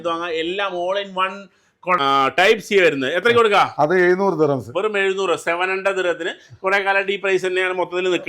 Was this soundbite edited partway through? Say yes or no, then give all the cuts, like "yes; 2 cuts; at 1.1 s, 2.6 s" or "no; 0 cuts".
yes; 1 cut; at 2.0 s